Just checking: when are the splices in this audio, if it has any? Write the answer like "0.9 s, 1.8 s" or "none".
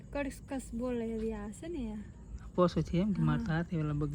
none

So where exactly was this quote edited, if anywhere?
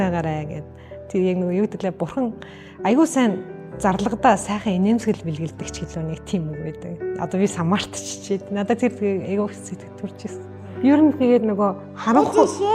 10.6 s

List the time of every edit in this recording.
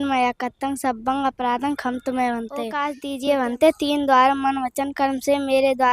2.9 s

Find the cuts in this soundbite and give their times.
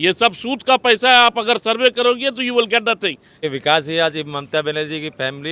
3.4 s

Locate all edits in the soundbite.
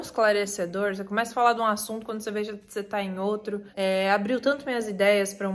none

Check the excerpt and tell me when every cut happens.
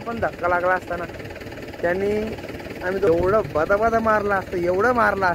3.1 s

